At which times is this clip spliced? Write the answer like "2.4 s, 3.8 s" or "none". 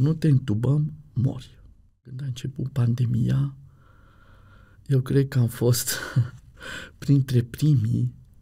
2.3 s